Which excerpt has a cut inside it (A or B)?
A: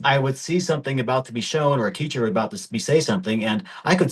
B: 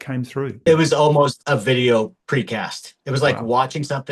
B